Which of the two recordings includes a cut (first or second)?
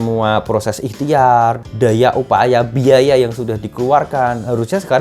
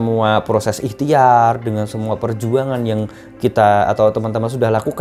first